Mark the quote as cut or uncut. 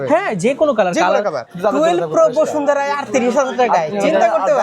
cut